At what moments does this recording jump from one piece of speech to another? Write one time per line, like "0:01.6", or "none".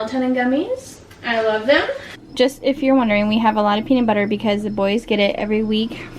0:02.2